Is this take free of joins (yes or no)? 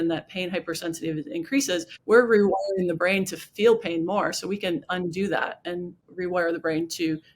no